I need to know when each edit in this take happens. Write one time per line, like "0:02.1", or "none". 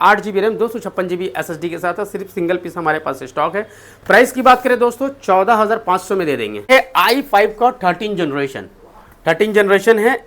0:06.7